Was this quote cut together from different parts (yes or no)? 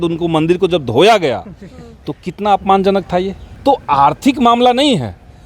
yes